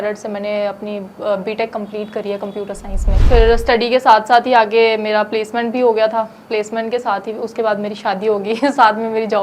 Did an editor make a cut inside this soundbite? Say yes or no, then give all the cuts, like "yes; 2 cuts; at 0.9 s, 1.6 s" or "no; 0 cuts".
yes; 1 cut; at 3.2 s